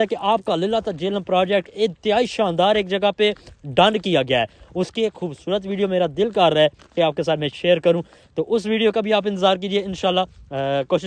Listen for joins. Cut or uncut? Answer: uncut